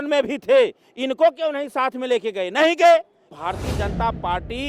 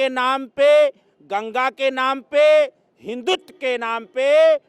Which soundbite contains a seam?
first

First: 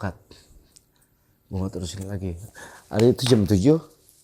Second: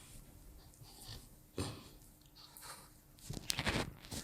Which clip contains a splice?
first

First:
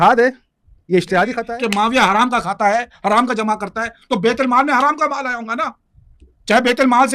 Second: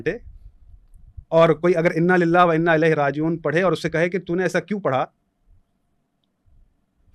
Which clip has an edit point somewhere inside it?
first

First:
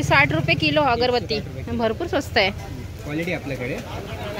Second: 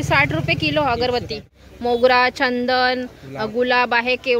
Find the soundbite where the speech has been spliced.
second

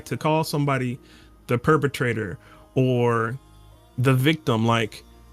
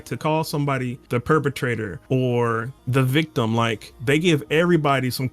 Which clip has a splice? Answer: second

